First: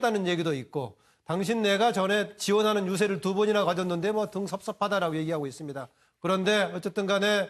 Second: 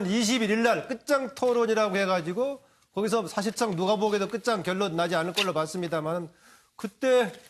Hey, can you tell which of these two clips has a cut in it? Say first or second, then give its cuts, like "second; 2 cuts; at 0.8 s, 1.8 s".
first; 1 cut; at 1.5 s